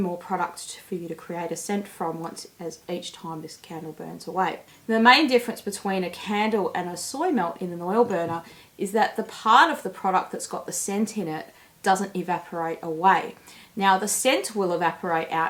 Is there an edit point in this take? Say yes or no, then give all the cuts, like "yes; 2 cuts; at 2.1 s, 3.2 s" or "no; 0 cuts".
no; 0 cuts